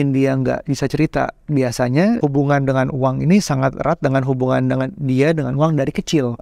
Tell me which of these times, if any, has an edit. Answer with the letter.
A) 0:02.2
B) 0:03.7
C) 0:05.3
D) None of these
A